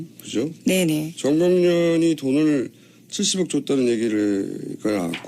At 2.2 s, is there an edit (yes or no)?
yes